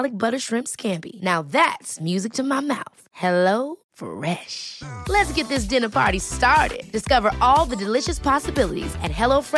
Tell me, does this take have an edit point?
no; 0 cuts

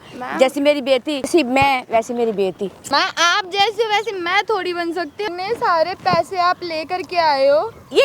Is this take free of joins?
no; 3 cuts; at 1.3 s, 2.8 s, 5.3 s

